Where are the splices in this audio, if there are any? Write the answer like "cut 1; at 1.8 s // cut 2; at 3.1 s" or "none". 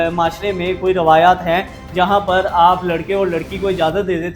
none